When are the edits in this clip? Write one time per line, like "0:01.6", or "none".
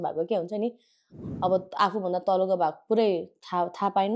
0:01.2